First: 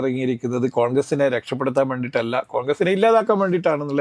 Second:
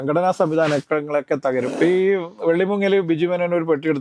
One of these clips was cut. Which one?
second; 1 cut; at 1.7 s

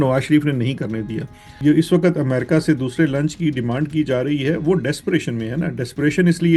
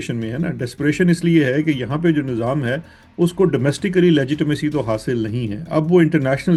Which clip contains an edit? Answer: first; 1 cut; at 1.5 s

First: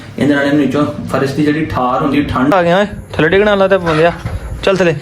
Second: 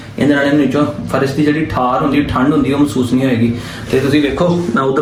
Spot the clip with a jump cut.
first; 1 cut; at 2.5 s

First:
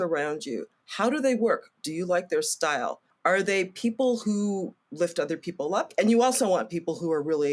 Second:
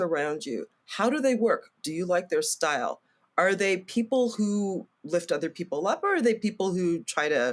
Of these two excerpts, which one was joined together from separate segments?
first; 2 cuts; at 3.0 s, 5.9 s

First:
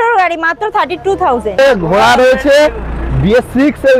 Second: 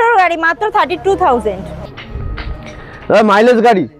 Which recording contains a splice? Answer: first; 1 cut; at 1.6 s

